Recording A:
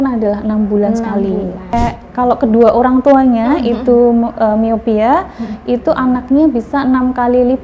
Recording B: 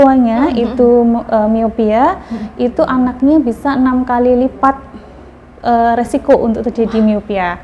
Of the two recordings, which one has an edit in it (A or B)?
A